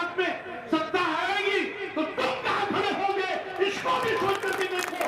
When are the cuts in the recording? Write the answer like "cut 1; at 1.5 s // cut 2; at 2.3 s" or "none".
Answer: none